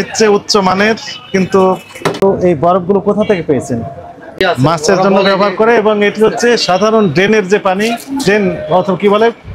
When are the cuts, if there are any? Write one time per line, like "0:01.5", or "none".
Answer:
0:02.2
0:04.4